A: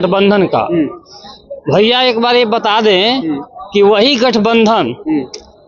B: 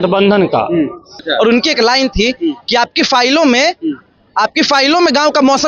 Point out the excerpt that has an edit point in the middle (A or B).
B